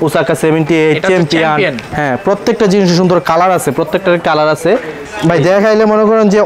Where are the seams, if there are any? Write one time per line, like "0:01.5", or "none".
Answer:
0:05.1

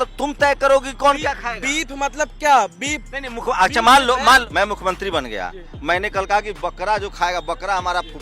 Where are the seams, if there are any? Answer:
0:04.5

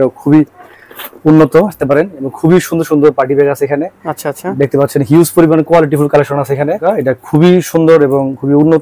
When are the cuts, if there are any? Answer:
0:01.8
0:06.8

